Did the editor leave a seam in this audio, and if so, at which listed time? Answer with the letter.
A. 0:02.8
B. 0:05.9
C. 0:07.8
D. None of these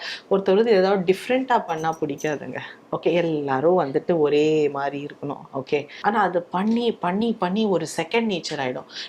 B